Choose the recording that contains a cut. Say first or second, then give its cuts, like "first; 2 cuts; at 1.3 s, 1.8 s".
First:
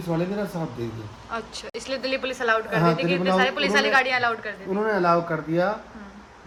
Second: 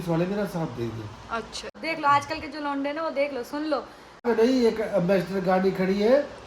second; 2 cuts; at 1.8 s, 4.2 s